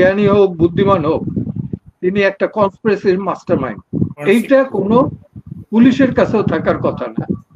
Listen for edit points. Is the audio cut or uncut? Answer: cut